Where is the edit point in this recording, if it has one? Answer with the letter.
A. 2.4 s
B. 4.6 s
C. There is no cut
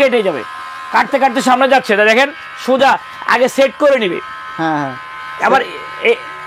C